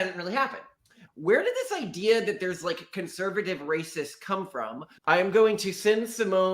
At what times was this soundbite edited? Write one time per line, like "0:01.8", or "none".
0:00.9
0:05.0